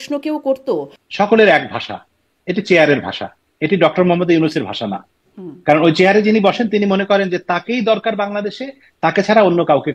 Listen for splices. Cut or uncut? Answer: cut